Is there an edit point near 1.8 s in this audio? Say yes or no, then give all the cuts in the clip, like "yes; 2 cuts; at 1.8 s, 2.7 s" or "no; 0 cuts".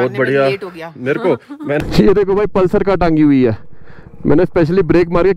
yes; 1 cut; at 1.8 s